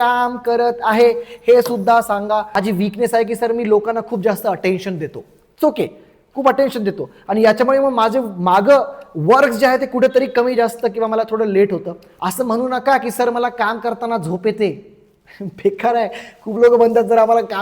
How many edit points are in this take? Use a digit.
2